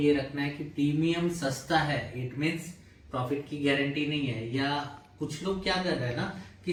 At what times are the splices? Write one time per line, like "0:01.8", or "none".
none

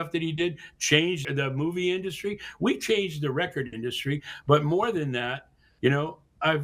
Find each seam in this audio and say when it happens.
0:01.2

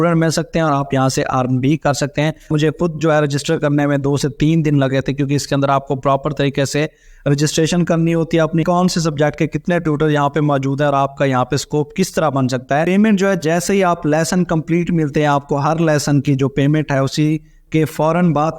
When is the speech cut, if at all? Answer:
0:02.5
0:08.6
0:12.9

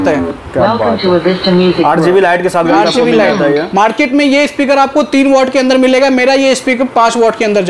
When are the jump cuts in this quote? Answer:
none

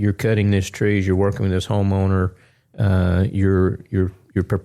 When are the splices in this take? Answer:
none

